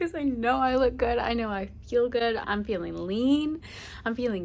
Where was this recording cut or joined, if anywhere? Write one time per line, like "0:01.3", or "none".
0:02.4